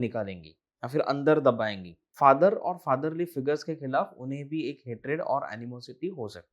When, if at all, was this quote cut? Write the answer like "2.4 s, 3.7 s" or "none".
2.0 s

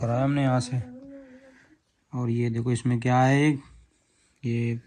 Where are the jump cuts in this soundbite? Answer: none

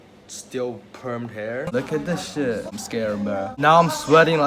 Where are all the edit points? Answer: 1.7 s, 2.7 s

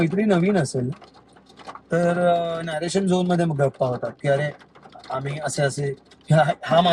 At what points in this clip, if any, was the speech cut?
none

